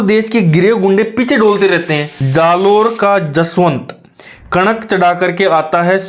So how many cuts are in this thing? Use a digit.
1